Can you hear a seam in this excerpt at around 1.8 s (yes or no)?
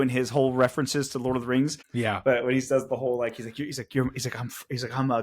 yes